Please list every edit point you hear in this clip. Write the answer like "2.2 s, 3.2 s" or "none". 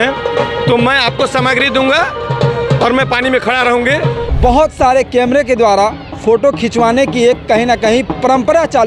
4.2 s